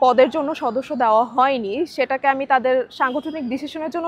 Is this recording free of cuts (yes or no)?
yes